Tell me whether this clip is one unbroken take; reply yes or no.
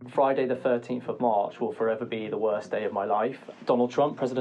no